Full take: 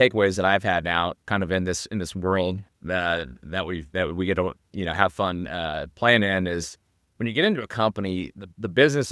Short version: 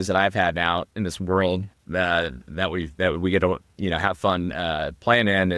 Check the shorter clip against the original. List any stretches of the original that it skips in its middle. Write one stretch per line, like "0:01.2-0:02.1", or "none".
0:01.2-0:01.9